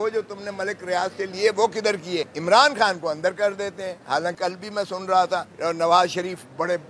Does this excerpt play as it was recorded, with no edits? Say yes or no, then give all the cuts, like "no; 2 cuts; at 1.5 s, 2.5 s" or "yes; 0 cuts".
no; 3 cuts; at 2.3 s, 4.3 s, 5.5 s